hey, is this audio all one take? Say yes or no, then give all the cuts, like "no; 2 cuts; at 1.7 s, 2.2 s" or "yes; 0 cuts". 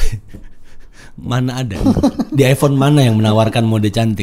no; 1 cut; at 1.8 s